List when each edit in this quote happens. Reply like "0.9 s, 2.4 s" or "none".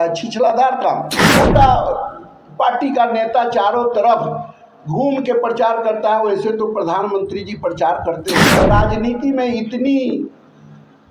1.2 s, 8.6 s